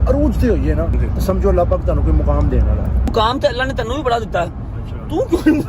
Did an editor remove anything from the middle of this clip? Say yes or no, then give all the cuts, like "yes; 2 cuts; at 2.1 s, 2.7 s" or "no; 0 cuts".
yes; 2 cuts; at 1.0 s, 3.1 s